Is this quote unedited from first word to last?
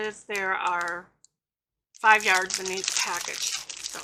yes; 0 cuts

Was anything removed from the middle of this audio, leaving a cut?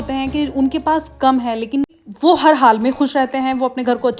yes; 1 cut; at 2.0 s

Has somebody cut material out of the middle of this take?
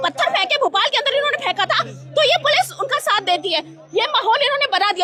no; 0 cuts

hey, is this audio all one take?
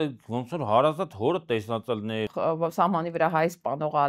no; 1 cut; at 2.3 s

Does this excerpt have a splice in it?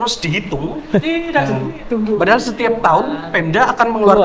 no; 0 cuts

